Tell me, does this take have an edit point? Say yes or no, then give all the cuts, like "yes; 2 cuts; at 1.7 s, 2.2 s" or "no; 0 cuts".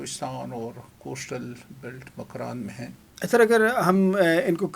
yes; 1 cut; at 3.0 s